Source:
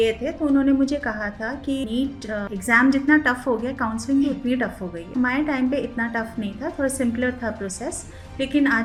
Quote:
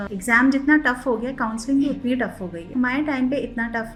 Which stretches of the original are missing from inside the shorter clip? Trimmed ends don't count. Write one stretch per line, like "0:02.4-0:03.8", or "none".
none

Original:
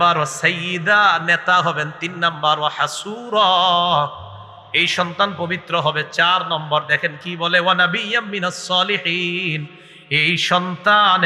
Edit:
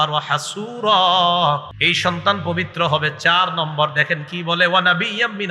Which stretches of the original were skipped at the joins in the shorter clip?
0:04.3-0:04.7

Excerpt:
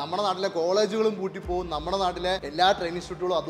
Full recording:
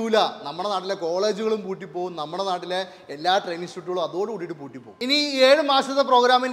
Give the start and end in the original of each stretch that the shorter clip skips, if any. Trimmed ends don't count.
0:02.9-0:03.1

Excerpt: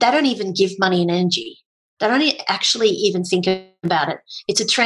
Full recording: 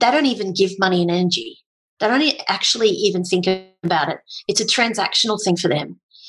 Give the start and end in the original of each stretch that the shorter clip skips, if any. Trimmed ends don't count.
none

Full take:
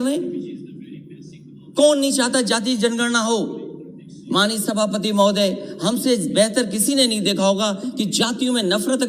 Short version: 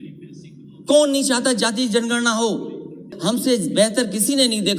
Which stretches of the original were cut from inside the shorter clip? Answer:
0:04.0-0:05.7

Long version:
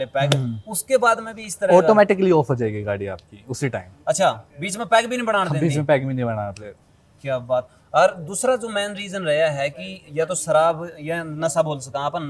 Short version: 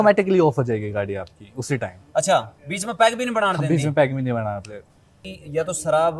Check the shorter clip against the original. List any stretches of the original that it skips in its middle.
0:07.1-0:09.8

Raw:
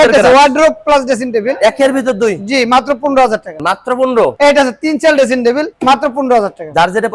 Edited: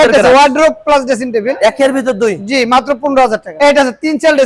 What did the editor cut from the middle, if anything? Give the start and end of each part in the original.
0:03.5-0:04.3

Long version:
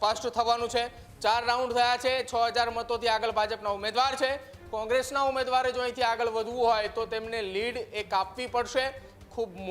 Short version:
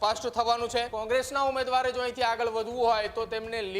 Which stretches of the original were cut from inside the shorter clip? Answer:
0:00.9-0:04.7

